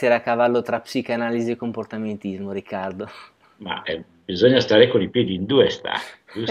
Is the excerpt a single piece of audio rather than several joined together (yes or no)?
yes